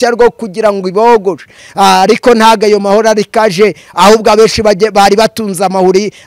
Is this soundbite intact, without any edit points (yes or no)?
no